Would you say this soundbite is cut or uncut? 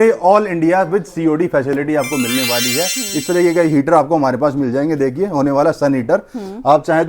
cut